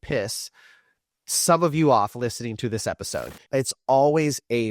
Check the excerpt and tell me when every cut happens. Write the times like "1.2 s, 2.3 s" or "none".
3.4 s